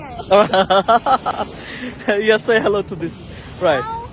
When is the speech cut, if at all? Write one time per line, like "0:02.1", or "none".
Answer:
0:01.3